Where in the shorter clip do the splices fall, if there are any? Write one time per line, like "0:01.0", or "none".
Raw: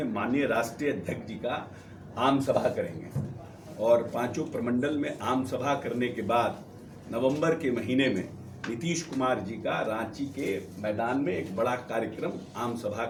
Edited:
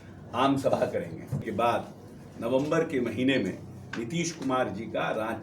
0:01.5